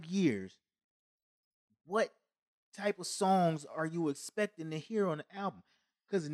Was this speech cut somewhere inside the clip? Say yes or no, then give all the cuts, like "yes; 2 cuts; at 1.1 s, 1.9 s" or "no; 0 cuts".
no; 0 cuts